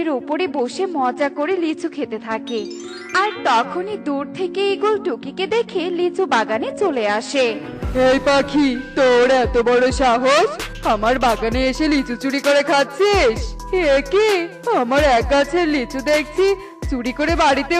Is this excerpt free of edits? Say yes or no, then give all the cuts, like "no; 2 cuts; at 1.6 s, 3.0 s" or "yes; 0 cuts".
yes; 0 cuts